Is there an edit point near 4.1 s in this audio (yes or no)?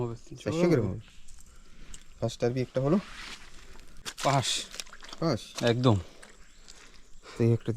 yes